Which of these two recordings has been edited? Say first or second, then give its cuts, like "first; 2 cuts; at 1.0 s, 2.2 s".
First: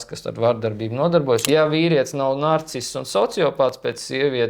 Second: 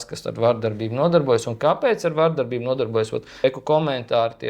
first; 1 cut; at 1.4 s